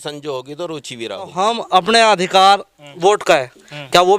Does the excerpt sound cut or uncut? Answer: cut